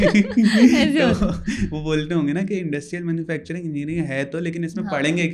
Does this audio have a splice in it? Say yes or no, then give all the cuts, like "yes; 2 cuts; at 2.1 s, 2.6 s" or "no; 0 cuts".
no; 0 cuts